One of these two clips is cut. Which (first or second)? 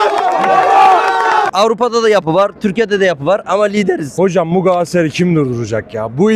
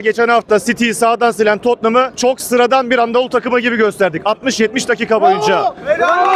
first